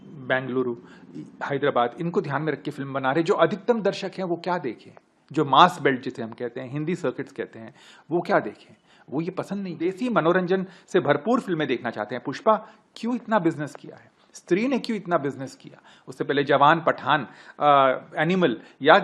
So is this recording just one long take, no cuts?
yes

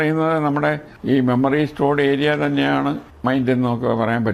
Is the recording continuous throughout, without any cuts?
no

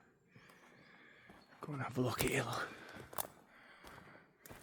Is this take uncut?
yes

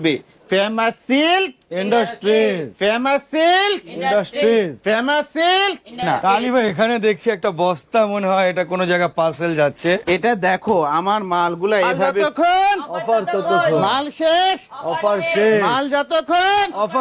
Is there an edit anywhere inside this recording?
yes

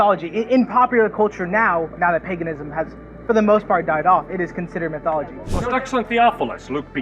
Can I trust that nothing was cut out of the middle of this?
no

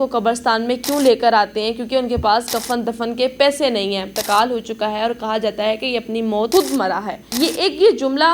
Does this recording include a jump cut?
yes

